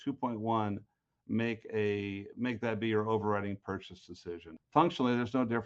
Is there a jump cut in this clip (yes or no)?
yes